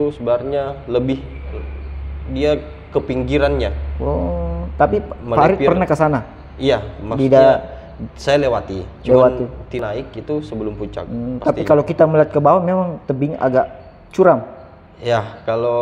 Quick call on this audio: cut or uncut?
cut